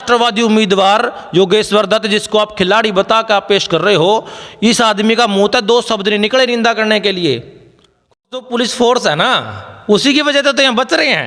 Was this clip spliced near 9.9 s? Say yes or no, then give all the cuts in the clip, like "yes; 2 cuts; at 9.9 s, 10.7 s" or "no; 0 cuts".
no; 1 cut; at 8.3 s